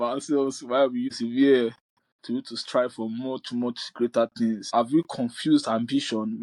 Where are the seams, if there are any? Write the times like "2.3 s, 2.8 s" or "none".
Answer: 1.1 s, 4.7 s